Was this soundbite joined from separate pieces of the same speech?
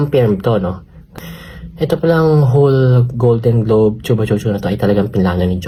no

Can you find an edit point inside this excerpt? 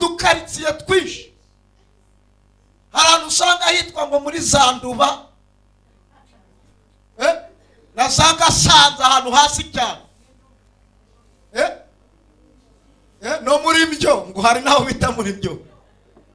no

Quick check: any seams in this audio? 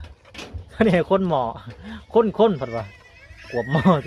no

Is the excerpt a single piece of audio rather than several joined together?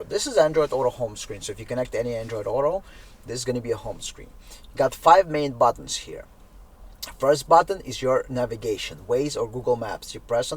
yes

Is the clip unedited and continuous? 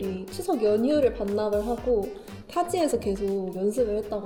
yes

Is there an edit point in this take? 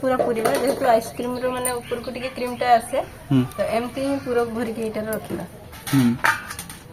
no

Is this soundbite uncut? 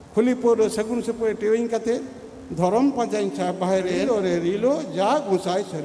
no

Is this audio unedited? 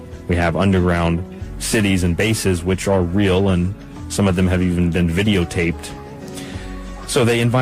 no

